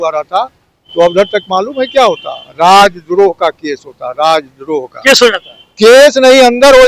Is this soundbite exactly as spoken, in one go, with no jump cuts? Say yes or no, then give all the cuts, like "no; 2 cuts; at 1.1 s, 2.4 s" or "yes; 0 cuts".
yes; 0 cuts